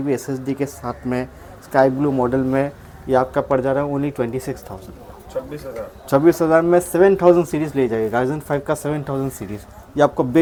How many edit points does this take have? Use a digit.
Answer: 0